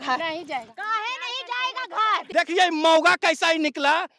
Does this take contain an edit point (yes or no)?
yes